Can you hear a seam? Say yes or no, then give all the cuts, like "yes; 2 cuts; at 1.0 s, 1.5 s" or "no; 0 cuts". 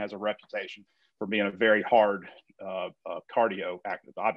yes; 1 cut; at 0.9 s